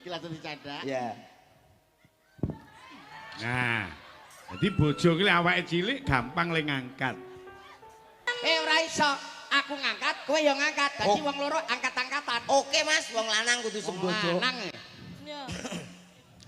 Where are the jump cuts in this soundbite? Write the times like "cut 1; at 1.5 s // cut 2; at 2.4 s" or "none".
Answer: cut 1; at 8.3 s